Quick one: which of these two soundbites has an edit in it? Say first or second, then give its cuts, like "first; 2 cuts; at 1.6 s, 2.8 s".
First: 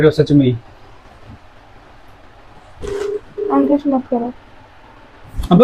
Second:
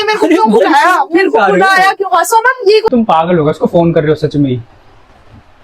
second; 1 cut; at 2.9 s